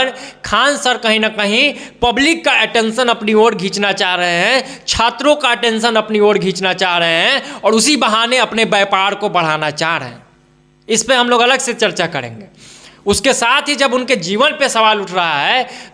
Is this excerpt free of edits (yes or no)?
yes